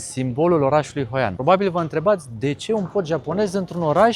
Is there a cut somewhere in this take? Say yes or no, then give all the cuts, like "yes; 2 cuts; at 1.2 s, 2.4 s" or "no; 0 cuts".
yes; 1 cut; at 1.3 s